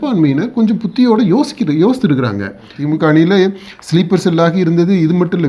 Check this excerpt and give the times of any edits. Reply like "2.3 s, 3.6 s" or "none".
2.7 s

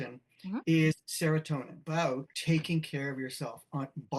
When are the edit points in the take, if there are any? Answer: 1.8 s

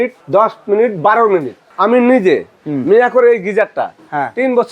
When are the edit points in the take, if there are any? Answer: 1.6 s

